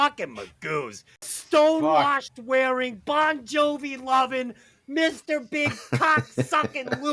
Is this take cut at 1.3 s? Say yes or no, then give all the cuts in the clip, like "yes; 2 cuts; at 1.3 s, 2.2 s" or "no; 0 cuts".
yes; 1 cut; at 1.3 s